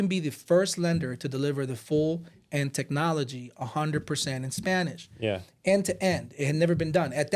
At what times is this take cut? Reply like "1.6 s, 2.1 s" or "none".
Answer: none